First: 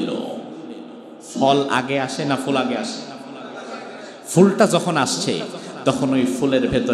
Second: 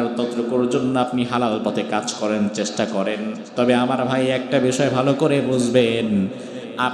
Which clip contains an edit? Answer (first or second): second